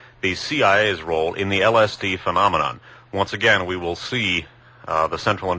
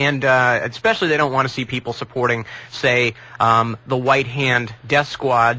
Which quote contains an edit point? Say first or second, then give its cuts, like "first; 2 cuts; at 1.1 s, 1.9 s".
second; 1 cut; at 3.0 s